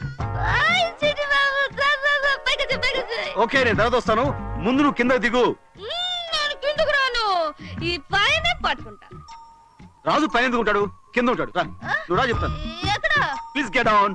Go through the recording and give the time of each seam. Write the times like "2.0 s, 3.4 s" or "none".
none

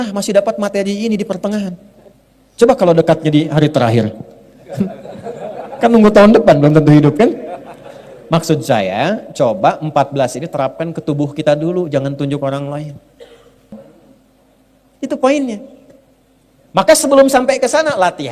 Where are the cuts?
13.7 s

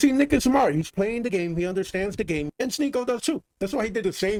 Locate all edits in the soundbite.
none

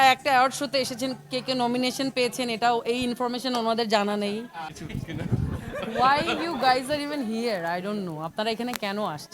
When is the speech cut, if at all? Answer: 4.7 s

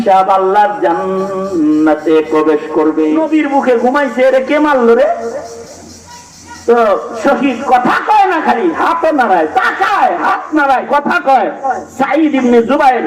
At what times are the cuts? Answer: 3.2 s

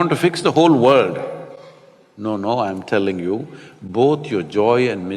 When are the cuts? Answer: none

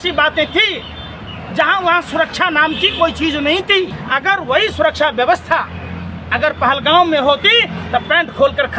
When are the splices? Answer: 4.0 s

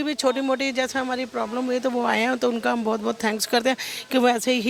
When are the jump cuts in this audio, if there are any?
none

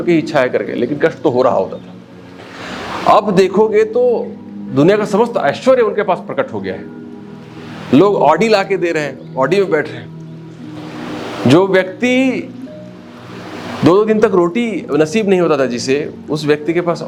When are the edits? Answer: none

